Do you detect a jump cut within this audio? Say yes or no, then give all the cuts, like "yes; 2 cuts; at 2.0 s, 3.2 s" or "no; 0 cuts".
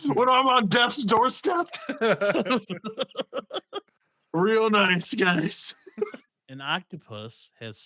yes; 1 cut; at 6.3 s